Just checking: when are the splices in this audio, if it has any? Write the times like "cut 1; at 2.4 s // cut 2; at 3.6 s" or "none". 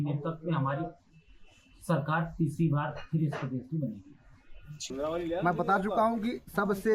cut 1; at 4.7 s